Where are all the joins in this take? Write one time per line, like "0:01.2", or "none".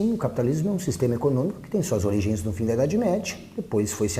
0:02.9